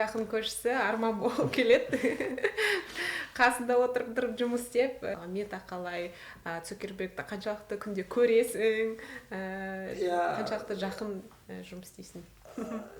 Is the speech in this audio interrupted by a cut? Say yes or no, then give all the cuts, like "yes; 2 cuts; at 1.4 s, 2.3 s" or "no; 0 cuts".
yes; 1 cut; at 5.1 s